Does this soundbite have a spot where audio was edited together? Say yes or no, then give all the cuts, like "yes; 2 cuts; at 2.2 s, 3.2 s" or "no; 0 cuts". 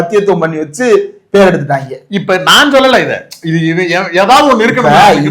no; 0 cuts